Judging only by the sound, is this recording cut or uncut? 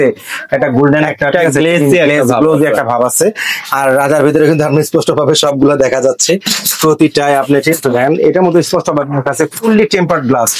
uncut